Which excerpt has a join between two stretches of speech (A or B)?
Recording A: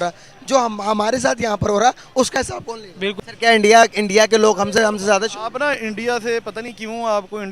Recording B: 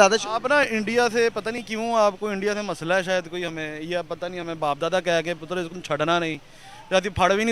A